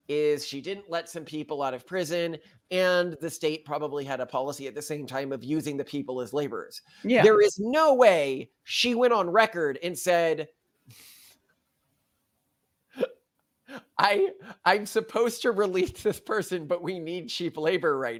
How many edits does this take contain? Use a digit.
0